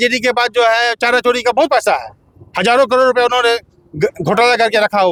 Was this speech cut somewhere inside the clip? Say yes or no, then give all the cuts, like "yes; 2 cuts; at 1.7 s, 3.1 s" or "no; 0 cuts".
no; 0 cuts